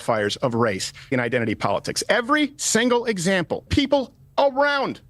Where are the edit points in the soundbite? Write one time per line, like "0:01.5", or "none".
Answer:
0:01.1
0:04.1